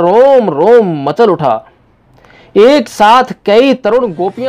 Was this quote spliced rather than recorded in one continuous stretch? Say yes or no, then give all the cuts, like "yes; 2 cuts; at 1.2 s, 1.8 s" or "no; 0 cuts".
no; 0 cuts